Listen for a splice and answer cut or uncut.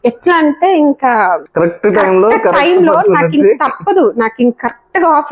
uncut